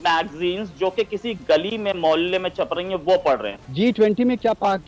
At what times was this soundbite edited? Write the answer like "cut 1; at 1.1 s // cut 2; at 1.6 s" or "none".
cut 1; at 3.6 s